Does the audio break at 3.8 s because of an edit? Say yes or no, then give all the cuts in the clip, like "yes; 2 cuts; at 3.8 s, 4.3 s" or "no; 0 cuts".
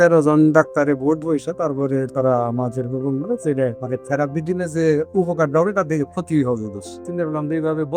yes; 2 cuts; at 3.8 s, 7.0 s